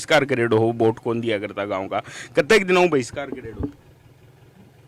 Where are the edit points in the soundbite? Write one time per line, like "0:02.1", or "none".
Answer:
none